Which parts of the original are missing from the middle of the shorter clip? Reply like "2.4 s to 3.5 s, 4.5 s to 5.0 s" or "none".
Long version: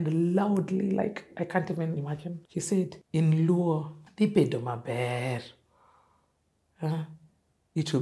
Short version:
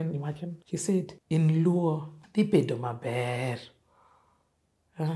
none